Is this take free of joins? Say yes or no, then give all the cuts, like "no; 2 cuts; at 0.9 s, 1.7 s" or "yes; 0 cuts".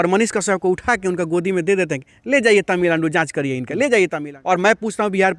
no; 1 cut; at 4.2 s